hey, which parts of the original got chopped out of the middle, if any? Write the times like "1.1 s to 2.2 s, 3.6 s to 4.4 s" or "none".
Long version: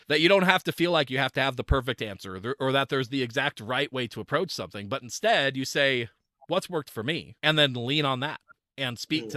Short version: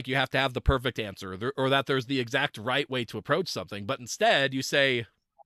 none